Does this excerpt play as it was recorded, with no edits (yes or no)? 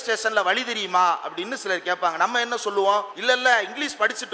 no